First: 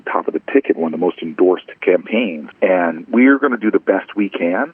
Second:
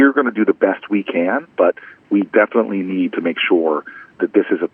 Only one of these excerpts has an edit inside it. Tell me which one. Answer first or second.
first